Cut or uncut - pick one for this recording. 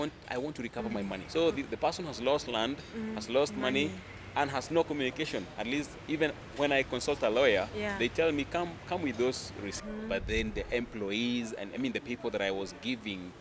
cut